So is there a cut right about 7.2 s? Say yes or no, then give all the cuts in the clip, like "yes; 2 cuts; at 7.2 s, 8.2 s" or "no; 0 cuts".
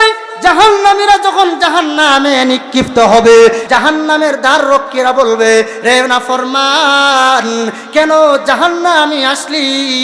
no; 1 cut; at 3.6 s